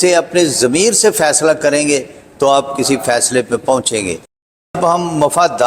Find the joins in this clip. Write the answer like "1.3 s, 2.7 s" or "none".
4.6 s